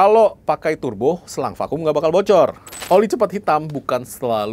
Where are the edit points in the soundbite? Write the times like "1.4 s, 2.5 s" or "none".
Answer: 2.7 s